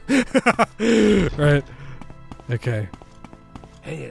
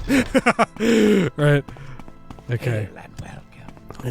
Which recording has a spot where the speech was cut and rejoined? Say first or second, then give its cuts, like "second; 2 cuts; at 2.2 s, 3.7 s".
second; 1 cut; at 2.9 s